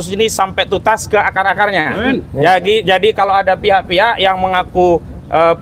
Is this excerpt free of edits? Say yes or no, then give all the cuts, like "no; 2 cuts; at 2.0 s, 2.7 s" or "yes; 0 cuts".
yes; 0 cuts